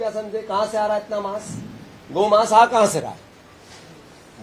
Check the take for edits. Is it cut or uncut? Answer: uncut